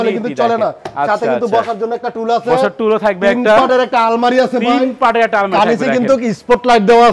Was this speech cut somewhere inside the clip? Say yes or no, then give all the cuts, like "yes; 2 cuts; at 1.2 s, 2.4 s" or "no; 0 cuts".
no; 0 cuts